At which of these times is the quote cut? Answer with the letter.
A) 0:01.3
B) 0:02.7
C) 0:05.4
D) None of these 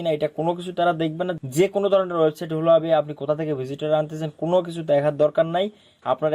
A